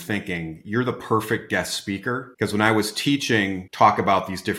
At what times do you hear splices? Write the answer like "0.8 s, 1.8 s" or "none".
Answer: 2.3 s, 3.6 s